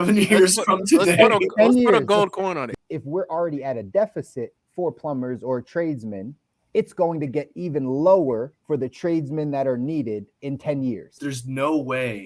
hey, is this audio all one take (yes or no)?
no